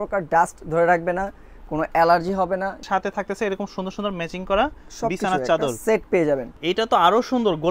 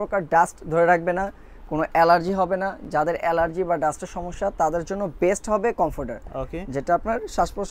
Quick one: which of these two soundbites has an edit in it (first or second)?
first